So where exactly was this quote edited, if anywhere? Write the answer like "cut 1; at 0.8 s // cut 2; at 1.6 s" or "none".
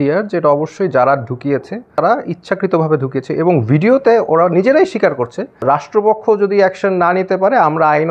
cut 1; at 2.0 s // cut 2; at 5.6 s